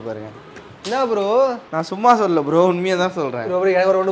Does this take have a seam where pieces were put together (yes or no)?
yes